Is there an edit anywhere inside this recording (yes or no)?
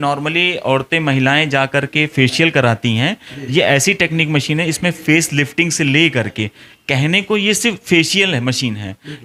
no